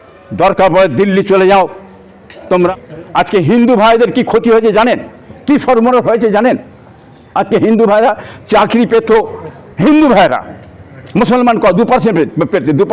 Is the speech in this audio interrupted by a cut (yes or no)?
yes